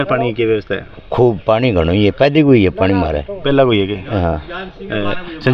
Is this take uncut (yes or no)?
yes